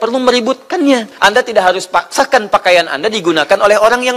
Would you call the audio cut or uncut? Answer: cut